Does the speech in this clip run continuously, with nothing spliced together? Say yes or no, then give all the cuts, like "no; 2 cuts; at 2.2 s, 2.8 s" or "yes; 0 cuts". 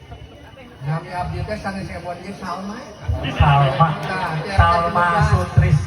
yes; 0 cuts